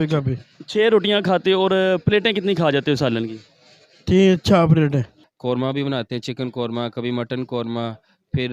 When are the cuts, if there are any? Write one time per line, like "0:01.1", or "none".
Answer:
0:05.2